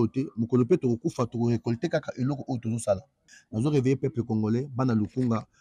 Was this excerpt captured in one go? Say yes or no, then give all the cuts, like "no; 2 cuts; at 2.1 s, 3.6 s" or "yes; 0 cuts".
no; 1 cut; at 3.2 s